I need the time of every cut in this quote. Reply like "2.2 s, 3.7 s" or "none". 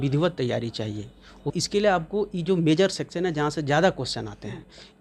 1.5 s